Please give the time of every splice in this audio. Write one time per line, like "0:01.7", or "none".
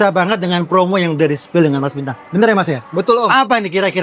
none

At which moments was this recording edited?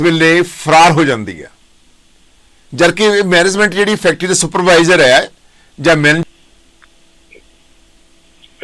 0:06.2

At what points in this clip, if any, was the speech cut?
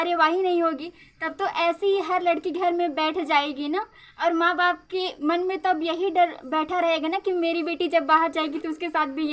none

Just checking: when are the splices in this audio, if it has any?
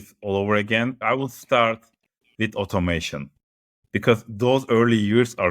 0:01.0

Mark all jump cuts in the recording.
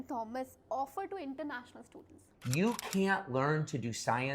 0:02.2

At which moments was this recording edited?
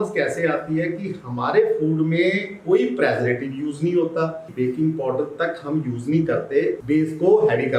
0:04.4
0:06.8

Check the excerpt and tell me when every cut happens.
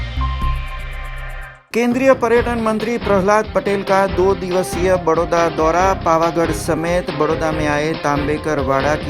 0:01.2

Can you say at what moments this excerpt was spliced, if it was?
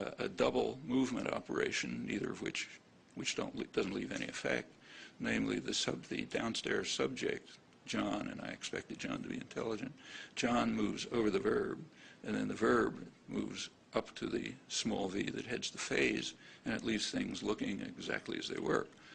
none

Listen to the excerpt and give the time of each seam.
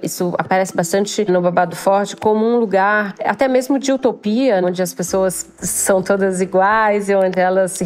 none

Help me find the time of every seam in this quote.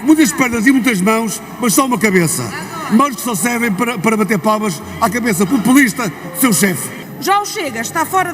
0:06.9

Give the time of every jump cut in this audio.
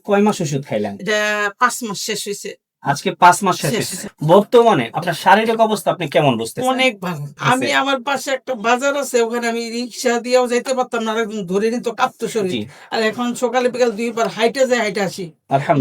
0:04.0
0:07.3

